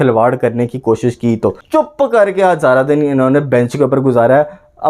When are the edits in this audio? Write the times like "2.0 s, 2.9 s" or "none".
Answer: 1.6 s